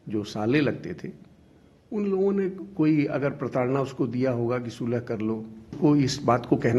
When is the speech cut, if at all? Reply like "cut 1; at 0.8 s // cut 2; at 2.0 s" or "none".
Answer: cut 1; at 5.7 s